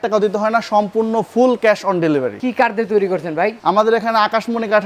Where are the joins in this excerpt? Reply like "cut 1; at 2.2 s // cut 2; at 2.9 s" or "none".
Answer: none